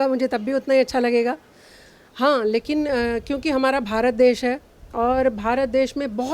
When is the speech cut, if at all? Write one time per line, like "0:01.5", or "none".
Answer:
none